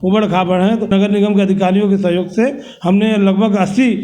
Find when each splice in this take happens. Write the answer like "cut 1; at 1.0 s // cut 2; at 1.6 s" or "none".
cut 1; at 0.9 s